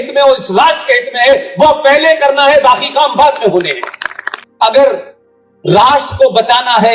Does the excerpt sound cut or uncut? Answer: cut